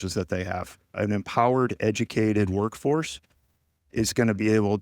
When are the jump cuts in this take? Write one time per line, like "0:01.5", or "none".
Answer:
0:00.9

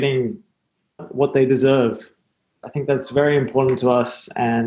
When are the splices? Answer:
0:01.0

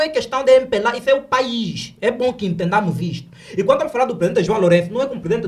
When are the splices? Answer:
none

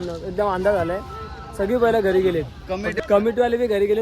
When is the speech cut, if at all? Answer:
0:02.9

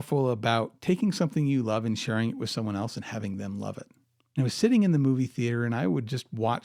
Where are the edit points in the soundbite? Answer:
none

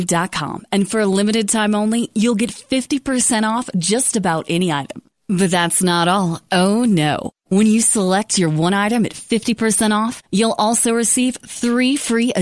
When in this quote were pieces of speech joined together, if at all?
none

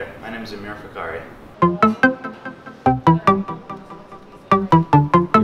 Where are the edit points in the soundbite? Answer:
0:01.5

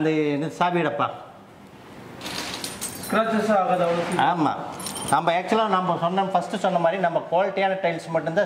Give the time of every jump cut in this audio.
none

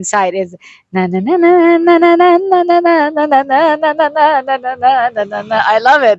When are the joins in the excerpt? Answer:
none

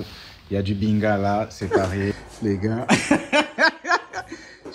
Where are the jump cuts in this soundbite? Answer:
0:01.7

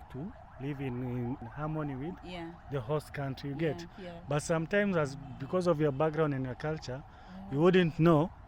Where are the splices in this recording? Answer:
0:01.4

